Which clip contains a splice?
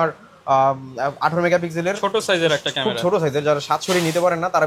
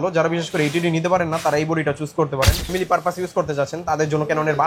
second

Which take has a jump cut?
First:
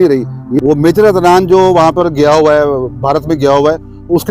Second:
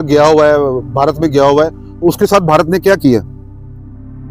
first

